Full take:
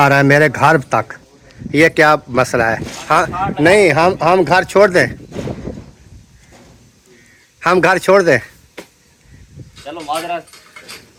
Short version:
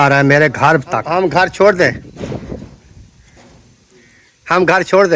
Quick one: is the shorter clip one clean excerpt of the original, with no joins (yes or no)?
no